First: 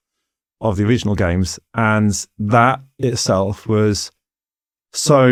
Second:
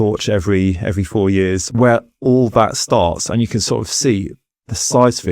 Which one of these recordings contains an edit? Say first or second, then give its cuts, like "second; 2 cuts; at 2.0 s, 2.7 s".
second; 1 cut; at 1.6 s